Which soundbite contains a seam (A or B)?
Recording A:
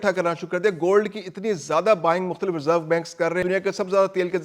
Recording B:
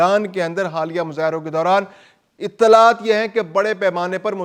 A